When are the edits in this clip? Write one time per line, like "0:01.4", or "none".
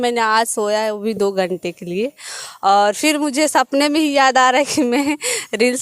none